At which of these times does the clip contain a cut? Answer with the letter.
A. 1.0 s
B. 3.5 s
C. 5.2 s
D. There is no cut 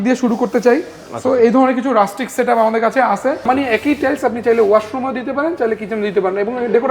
B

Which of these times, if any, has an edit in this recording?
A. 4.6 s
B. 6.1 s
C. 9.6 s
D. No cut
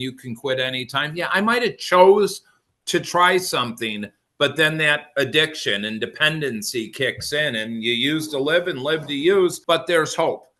C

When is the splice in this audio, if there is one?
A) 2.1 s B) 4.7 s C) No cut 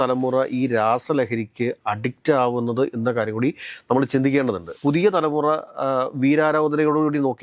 B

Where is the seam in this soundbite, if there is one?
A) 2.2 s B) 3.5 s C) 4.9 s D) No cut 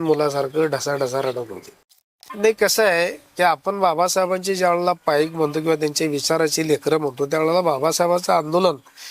A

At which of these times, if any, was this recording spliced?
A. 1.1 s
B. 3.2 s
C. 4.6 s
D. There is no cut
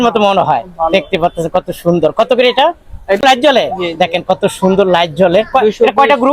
B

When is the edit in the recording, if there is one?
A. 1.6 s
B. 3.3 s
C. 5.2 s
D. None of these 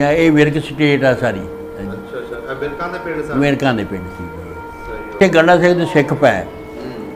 C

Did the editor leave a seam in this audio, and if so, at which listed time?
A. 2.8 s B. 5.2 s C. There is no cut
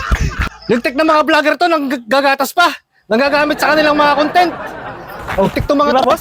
C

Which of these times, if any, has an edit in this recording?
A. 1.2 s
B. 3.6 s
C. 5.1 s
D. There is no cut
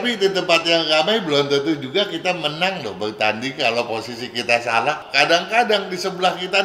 C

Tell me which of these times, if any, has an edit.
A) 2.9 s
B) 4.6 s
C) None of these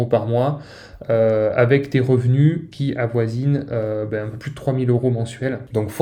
C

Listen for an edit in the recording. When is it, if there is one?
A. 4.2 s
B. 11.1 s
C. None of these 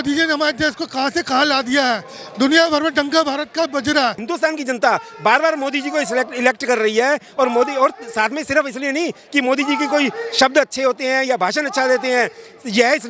A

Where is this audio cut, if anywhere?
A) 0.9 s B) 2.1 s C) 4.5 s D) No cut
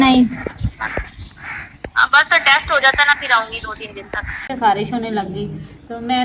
C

